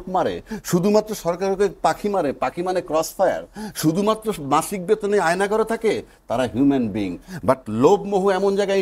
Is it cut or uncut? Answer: uncut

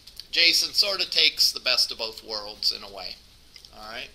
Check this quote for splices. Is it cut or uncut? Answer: cut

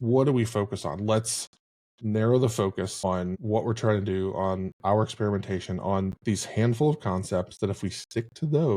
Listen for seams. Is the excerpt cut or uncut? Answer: cut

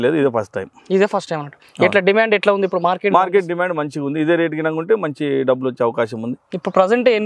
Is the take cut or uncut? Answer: uncut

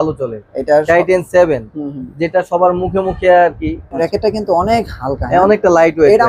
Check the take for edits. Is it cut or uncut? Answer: cut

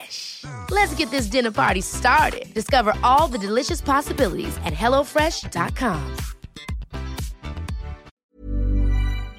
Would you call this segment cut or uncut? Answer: cut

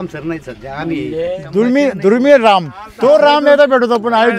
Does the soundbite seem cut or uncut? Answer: cut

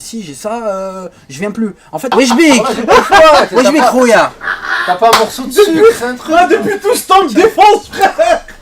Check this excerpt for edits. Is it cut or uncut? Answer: cut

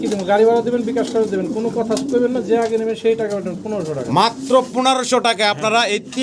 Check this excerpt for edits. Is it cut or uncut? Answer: uncut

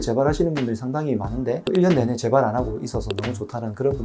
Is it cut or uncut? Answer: cut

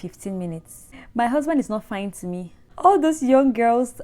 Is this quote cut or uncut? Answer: cut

